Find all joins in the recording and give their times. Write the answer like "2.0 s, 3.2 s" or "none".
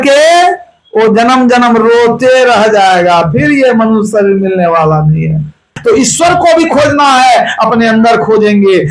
5.8 s